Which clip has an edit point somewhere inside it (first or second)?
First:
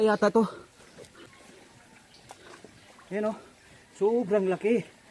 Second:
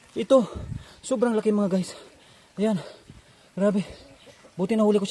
first